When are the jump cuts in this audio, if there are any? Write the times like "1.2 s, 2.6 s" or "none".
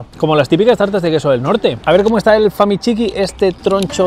1.8 s